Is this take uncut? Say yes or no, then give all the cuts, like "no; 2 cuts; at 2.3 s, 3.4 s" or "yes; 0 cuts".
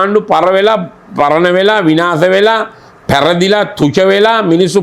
yes; 0 cuts